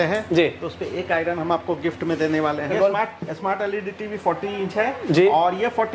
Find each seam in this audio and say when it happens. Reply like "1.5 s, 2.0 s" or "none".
2.7 s